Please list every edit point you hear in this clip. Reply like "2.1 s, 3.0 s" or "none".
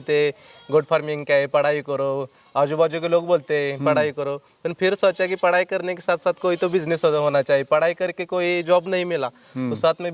none